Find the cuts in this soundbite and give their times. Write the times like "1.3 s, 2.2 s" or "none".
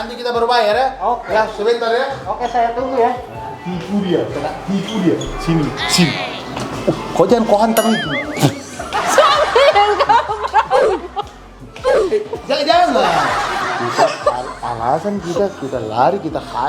none